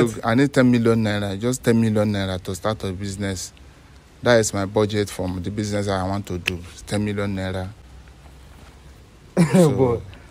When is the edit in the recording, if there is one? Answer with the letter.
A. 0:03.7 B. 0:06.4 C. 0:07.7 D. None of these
D